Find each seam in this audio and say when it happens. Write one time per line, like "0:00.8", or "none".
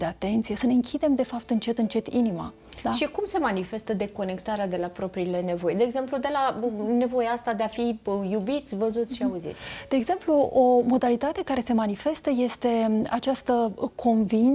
none